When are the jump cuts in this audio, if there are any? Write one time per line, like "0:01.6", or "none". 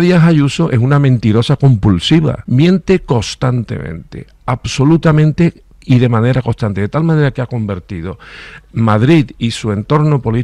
0:02.4